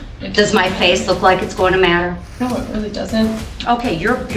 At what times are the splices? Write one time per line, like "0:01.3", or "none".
0:02.2
0:03.5